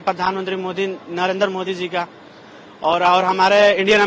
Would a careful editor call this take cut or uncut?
uncut